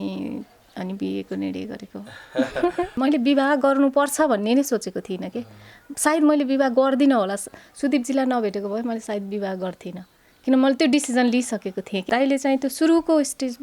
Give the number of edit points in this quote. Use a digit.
2